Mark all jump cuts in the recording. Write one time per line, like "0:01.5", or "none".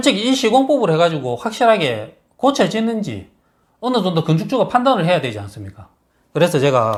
none